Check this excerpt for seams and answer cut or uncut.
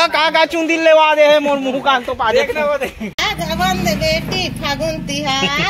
cut